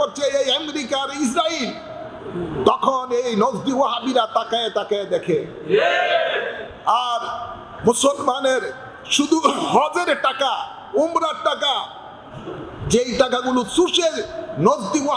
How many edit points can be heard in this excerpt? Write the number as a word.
zero